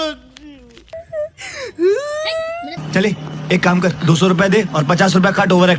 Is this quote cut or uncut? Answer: cut